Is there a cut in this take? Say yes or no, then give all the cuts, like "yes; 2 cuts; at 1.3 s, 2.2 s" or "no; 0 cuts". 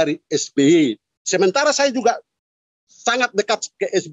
yes; 1 cut; at 1.1 s